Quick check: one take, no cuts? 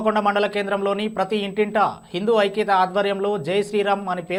yes; 0 cuts

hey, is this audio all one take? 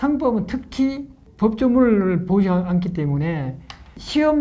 yes; 0 cuts

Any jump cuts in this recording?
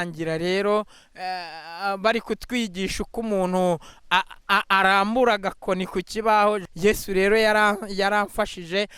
yes; 1 cut; at 6.7 s

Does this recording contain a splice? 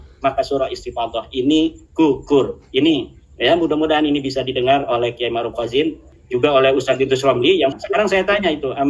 yes; 2 cuts; at 6.1 s, 7.7 s

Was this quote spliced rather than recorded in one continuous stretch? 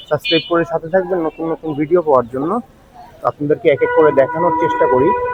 no; 0 cuts

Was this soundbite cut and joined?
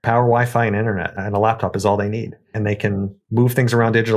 yes; 2 cuts; at 1.2 s, 2.6 s

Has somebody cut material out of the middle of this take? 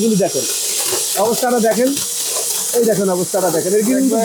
no; 0 cuts

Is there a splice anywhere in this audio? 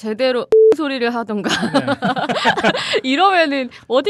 no; 0 cuts

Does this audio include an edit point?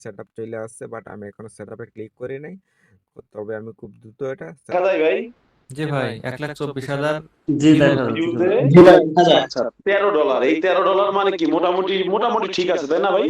yes; 1 cut; at 4.7 s

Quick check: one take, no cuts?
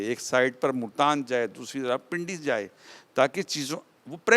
yes; 0 cuts

